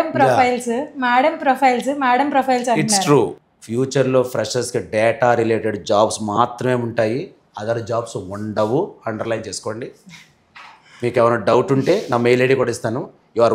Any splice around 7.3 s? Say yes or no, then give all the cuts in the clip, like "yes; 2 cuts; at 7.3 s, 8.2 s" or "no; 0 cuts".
no; 1 cut; at 3.4 s